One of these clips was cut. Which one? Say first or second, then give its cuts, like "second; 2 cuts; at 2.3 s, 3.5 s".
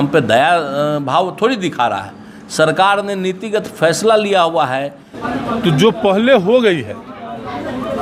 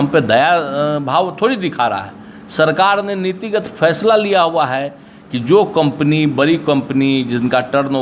first; 1 cut; at 5.1 s